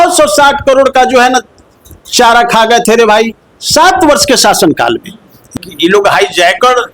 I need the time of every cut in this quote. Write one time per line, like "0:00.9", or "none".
0:05.5